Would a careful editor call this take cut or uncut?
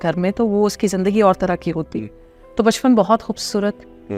uncut